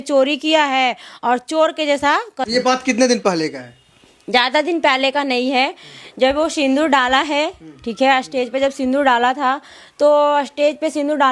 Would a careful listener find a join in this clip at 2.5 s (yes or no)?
yes